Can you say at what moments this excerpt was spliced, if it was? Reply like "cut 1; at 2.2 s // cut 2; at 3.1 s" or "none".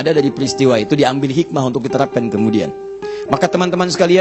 none

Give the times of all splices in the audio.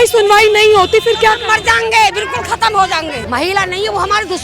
cut 1; at 3.2 s

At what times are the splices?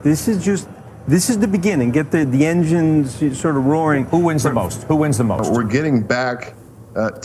cut 1; at 5.4 s

